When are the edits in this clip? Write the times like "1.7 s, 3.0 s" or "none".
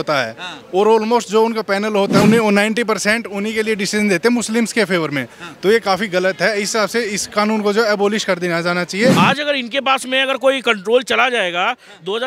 2.2 s, 9.1 s